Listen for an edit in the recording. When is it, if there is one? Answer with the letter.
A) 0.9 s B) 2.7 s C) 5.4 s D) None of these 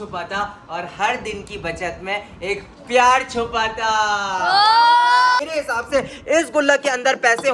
C